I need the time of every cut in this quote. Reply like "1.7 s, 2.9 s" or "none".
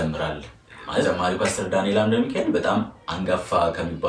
1.0 s